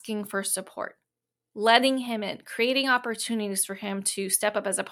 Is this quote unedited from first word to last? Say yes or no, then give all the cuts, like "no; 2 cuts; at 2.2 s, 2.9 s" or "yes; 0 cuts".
yes; 0 cuts